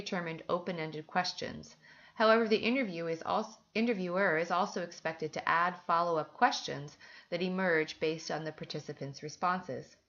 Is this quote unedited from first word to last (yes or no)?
no